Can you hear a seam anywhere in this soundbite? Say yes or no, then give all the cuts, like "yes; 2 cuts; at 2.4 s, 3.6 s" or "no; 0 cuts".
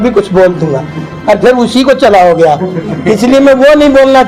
no; 0 cuts